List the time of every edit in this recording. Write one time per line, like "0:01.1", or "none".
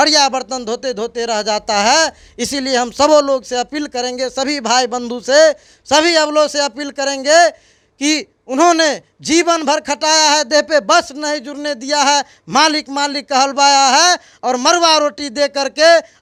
none